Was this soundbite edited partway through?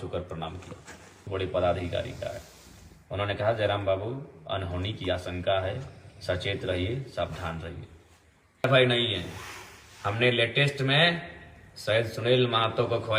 yes; 2 cuts; at 1.2 s, 8.7 s

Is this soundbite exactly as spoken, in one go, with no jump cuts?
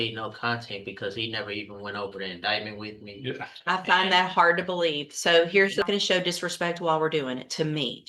no; 1 cut; at 5.8 s

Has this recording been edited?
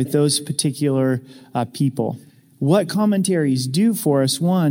yes; 1 cut; at 2.3 s

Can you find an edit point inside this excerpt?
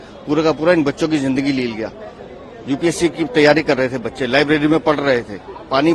no; 0 cuts

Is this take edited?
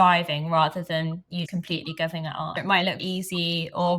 yes; 1 cut; at 2.6 s

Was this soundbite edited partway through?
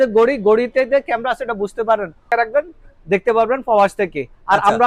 yes; 1 cut; at 2.3 s

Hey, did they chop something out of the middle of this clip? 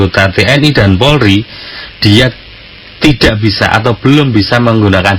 no; 0 cuts

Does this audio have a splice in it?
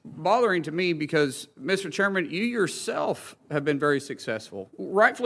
no; 0 cuts

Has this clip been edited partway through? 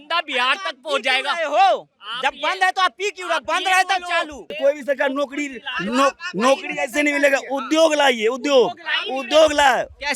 yes; 1 cut; at 4.6 s

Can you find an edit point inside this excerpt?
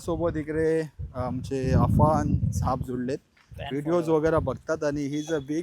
no; 0 cuts

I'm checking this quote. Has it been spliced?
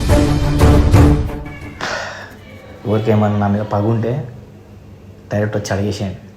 yes; 1 cut; at 1.7 s

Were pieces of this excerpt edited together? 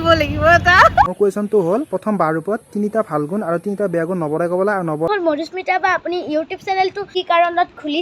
yes; 3 cuts; at 1.1 s, 5.1 s, 7.0 s

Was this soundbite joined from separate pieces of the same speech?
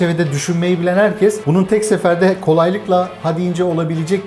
no; 0 cuts

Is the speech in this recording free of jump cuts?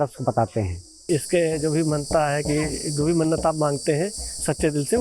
no; 1 cut; at 1.0 s

